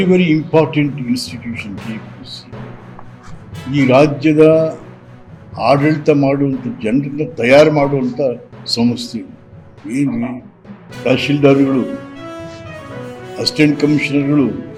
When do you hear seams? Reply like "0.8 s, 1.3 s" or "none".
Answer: none